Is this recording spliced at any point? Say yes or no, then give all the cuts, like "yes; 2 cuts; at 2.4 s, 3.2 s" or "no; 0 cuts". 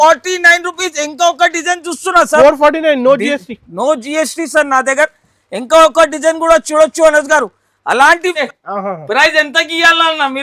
yes; 1 cut; at 8.4 s